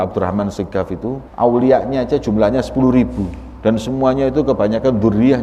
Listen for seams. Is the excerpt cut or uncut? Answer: cut